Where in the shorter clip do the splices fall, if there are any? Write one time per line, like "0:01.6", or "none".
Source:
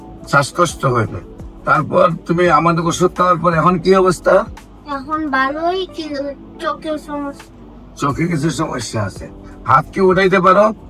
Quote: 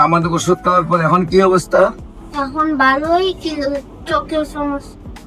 none